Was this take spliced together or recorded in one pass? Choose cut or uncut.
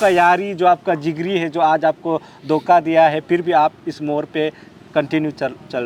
uncut